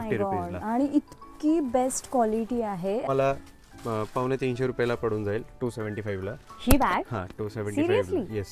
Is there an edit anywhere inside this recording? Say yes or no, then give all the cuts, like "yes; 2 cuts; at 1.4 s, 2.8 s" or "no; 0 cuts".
yes; 1 cut; at 3.0 s